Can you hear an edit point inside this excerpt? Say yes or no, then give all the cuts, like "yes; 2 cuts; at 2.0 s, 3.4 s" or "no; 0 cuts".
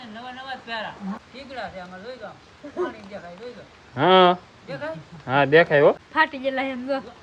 yes; 2 cuts; at 1.2 s, 6.0 s